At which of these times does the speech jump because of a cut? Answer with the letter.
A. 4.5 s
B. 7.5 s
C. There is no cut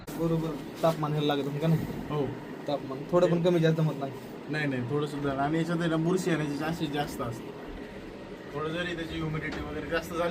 C